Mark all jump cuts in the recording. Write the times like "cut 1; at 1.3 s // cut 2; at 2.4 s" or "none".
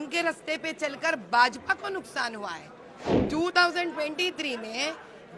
cut 1; at 3.1 s